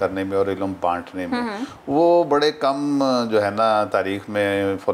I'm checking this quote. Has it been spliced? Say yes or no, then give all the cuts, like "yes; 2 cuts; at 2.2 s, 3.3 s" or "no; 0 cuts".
no; 0 cuts